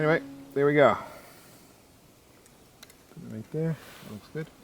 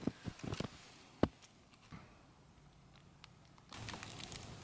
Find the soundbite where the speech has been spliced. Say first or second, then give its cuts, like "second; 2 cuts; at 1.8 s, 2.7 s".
second; 2 cuts; at 1.9 s, 3.7 s